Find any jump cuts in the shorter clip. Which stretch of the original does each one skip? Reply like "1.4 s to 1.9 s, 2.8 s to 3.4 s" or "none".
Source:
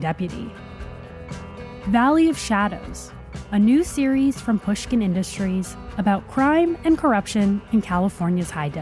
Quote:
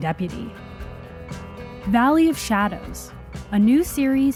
none